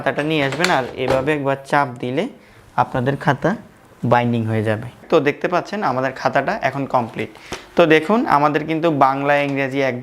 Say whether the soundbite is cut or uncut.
cut